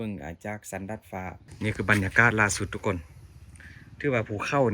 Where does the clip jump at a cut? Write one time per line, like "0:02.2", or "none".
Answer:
0:01.4